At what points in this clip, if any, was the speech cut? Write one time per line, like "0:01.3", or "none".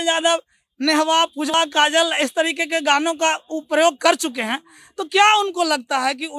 0:01.5